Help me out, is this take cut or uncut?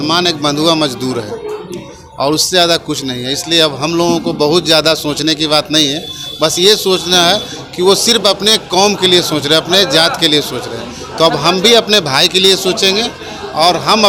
uncut